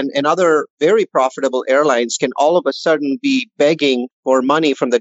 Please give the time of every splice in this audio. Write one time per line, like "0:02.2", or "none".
0:04.1